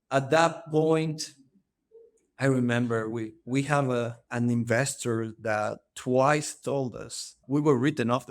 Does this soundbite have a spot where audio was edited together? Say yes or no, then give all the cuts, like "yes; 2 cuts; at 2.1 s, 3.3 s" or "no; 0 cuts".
yes; 1 cut; at 4.2 s